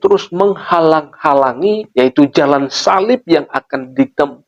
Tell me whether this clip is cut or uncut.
cut